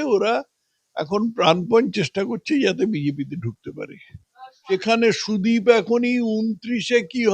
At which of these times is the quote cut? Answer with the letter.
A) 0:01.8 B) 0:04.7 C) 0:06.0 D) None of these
B